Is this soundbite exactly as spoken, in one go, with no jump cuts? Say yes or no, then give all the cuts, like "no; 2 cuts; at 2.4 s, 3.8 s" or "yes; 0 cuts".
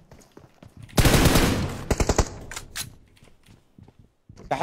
yes; 0 cuts